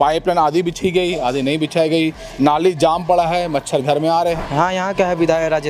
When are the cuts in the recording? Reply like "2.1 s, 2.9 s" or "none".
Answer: 4.4 s